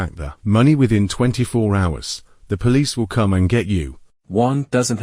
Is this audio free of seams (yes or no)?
yes